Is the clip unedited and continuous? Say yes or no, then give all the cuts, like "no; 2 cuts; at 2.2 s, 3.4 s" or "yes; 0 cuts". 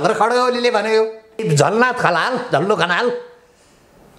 no; 1 cut; at 1.4 s